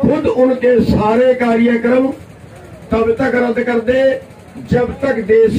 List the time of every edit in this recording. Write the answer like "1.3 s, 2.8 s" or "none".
none